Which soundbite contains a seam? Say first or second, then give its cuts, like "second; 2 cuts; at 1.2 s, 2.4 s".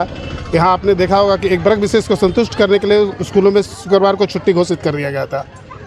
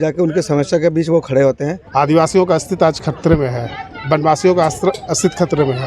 second; 1 cut; at 1.7 s